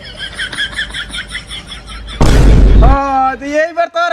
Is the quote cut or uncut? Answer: cut